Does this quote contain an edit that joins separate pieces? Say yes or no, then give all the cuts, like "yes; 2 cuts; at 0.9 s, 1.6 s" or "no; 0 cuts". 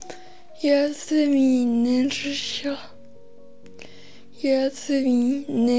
no; 0 cuts